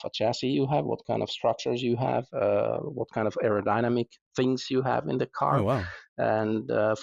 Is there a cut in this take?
no; 0 cuts

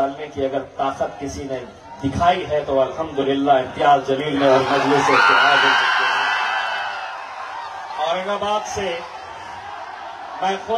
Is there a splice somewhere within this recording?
yes; 1 cut; at 7.0 s

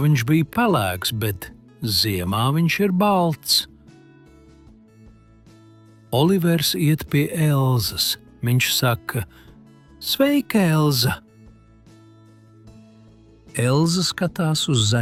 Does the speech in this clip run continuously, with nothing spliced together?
yes; 0 cuts

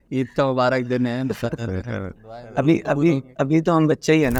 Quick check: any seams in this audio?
no; 0 cuts

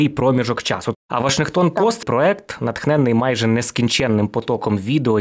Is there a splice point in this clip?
yes; 2 cuts; at 0.9 s, 2.0 s

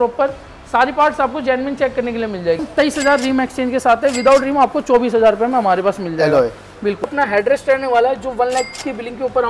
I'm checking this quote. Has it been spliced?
yes; 2 cuts; at 2.7 s, 7.1 s

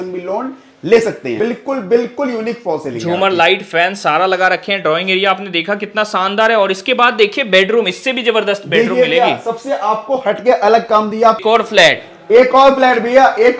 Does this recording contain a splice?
yes; 2 cuts; at 1.4 s, 11.4 s

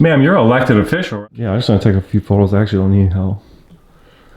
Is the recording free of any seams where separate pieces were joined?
no; 1 cut; at 1.0 s

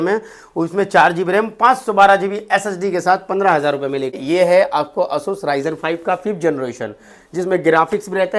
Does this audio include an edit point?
yes; 1 cut; at 4.2 s

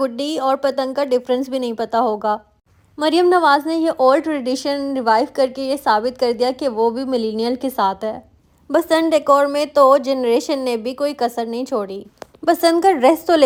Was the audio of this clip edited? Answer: no; 0 cuts

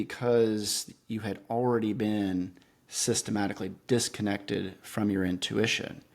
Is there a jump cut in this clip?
no; 0 cuts

